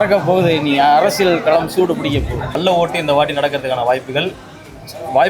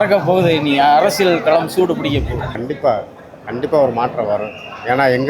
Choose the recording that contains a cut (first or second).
first